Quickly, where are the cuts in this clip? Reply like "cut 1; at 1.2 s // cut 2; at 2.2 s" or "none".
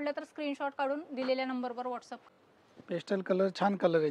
cut 1; at 2.1 s